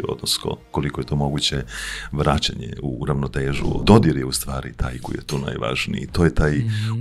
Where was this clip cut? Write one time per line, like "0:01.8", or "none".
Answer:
0:03.8